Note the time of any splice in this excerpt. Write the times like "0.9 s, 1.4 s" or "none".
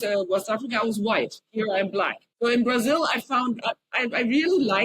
2.2 s, 3.9 s